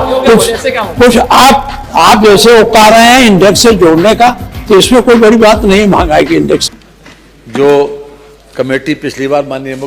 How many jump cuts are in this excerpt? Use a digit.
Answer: 1